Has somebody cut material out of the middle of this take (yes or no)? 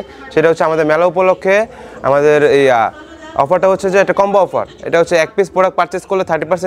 no